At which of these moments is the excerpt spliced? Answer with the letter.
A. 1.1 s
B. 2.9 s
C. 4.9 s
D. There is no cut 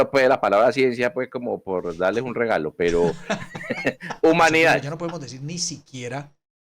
C